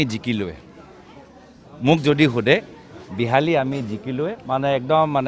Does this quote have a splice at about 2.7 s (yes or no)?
no